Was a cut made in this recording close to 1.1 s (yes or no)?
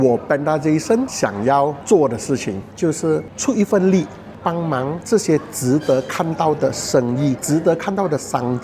yes